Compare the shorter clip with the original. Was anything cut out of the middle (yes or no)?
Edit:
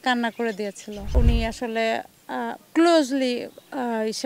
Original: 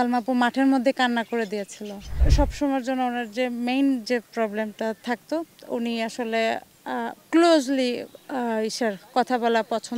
yes